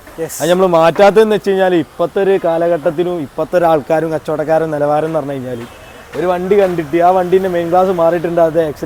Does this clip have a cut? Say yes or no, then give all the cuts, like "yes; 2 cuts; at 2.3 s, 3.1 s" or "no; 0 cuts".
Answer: no; 0 cuts